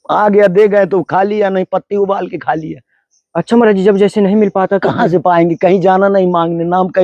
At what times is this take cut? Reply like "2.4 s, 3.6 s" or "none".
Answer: none